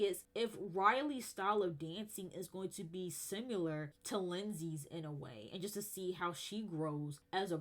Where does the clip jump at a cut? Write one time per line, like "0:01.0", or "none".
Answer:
none